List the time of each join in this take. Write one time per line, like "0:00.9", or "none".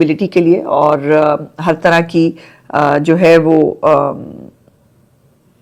none